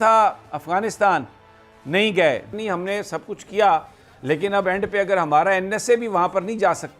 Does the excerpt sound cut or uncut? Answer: cut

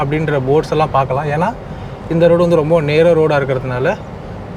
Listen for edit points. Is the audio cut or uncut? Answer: uncut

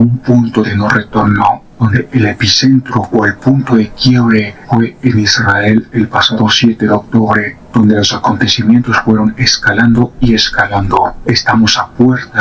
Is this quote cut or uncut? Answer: uncut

